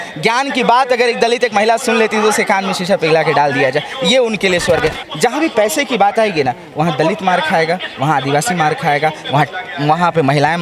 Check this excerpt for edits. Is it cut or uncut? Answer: cut